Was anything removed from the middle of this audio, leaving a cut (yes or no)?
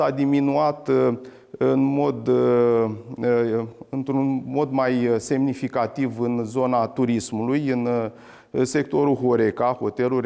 no